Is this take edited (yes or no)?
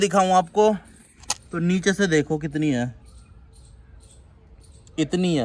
no